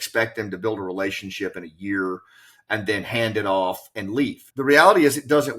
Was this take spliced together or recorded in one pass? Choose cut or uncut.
cut